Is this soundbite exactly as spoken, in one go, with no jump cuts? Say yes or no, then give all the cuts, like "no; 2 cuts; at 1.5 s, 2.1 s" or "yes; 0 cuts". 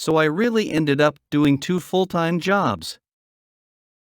no; 1 cut; at 1.4 s